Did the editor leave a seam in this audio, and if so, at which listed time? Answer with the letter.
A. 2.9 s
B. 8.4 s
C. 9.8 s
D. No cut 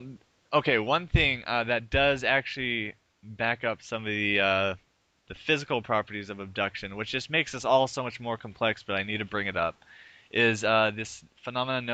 B